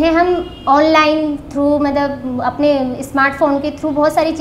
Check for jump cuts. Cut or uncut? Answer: uncut